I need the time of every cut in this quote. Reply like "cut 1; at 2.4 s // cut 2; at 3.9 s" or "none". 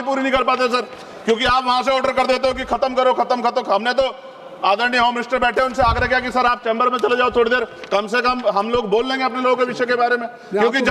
none